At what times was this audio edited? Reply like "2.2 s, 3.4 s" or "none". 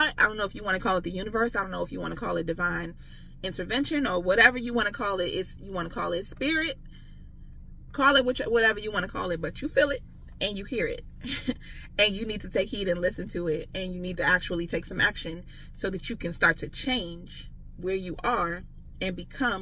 none